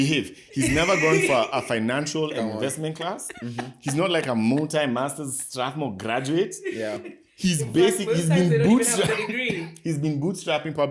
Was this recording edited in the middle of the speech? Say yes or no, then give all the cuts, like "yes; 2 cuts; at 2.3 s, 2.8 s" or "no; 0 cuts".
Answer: no; 0 cuts